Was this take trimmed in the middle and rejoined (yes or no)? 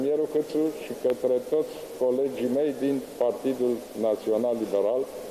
no